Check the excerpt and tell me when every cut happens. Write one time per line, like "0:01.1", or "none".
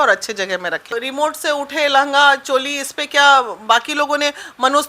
0:01.0

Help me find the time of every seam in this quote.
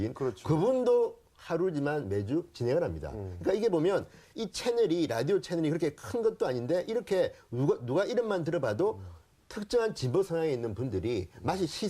0:06.0

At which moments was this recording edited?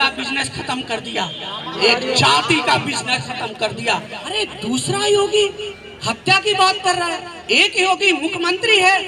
0:04.2

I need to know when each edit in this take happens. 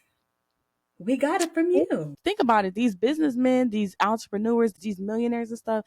0:02.2
0:04.8

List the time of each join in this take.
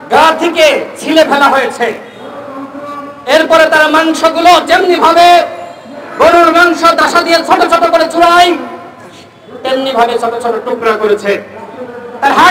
none

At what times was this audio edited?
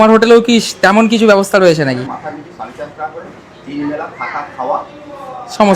0:02.1

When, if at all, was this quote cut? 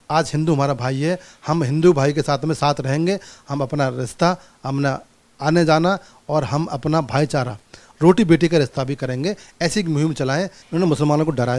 0:10.6

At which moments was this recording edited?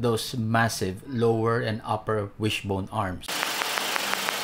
none

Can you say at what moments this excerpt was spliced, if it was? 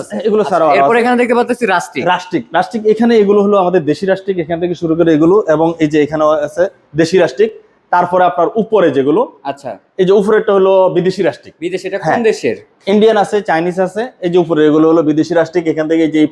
none

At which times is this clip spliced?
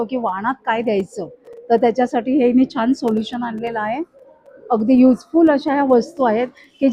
none

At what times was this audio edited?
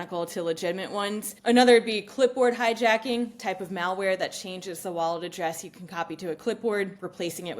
0:01.3

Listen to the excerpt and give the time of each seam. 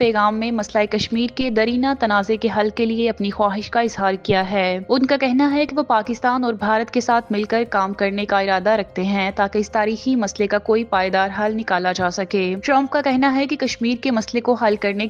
none

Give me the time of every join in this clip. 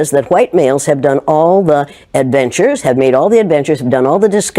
none

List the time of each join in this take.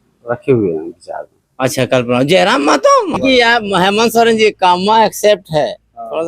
0:03.2

